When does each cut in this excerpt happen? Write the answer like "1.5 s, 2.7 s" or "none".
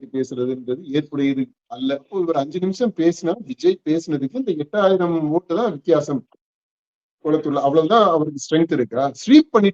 2.1 s